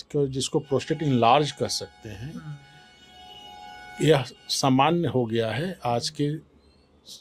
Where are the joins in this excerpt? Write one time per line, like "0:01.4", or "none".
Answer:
none